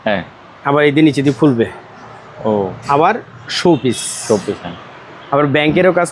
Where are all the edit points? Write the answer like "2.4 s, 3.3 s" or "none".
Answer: none